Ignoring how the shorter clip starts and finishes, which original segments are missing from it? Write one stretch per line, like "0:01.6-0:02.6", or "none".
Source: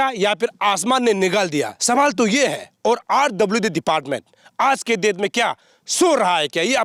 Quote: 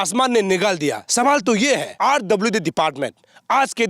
0:02.7-0:03.0